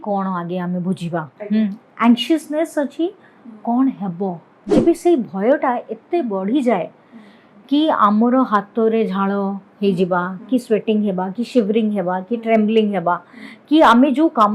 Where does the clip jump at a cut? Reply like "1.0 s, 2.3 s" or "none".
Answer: 4.8 s